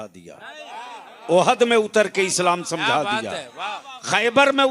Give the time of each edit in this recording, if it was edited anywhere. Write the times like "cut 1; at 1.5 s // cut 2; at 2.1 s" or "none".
none